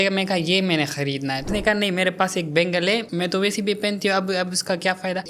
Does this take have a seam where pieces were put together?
yes; 1 cut; at 1.4 s

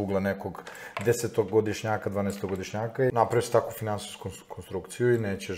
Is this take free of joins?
no; 1 cut; at 2.7 s

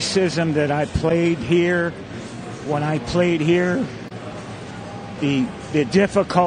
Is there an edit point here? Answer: no; 0 cuts

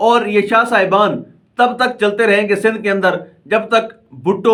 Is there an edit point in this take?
no; 0 cuts

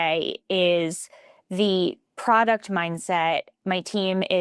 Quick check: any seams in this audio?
no; 0 cuts

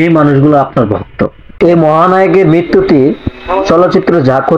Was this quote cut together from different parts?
yes; 1 cut; at 1.5 s

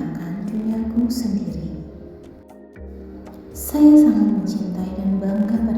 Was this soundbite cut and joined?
yes; 2 cuts; at 1.8 s, 3.7 s

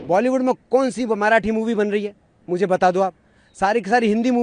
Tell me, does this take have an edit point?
no; 0 cuts

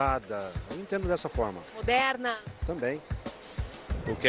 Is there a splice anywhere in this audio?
yes; 1 cut; at 1.1 s

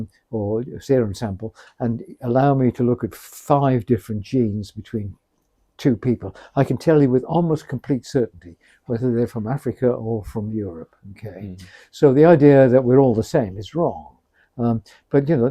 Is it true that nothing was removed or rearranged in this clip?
yes; 0 cuts

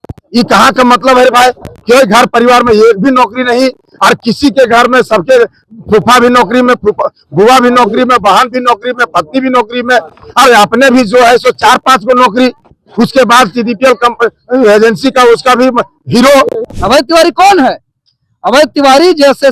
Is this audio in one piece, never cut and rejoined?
no; 1 cut; at 16.7 s

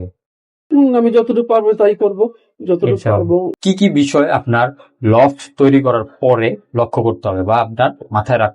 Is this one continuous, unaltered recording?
no; 1 cut; at 3.5 s

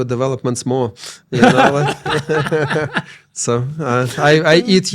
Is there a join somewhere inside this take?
no; 0 cuts

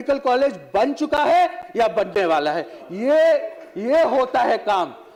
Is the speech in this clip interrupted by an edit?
no; 0 cuts

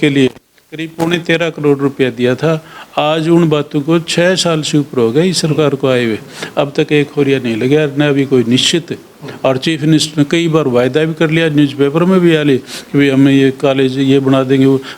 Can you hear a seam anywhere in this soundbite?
no; 0 cuts

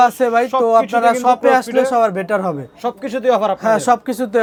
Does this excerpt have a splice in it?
no; 0 cuts

